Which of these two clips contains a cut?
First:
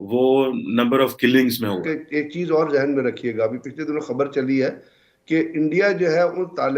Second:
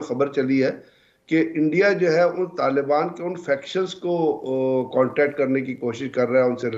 first; 1 cut; at 1.9 s

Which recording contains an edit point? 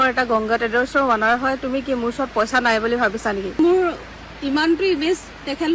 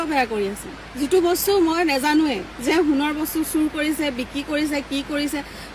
first; 1 cut; at 3.6 s

